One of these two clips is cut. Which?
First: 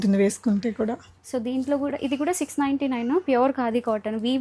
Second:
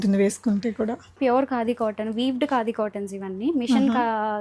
second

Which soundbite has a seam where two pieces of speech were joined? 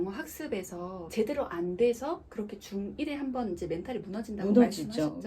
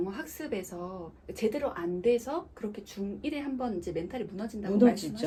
first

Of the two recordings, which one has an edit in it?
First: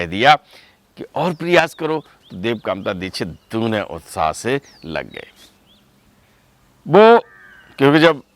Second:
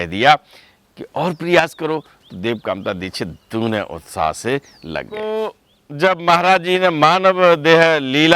second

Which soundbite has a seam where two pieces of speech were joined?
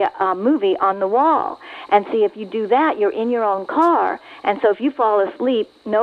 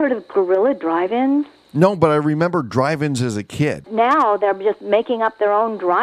second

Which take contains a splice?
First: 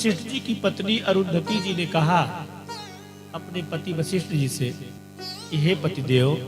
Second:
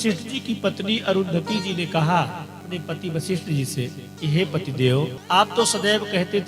second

